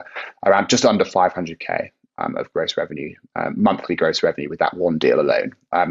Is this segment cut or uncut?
uncut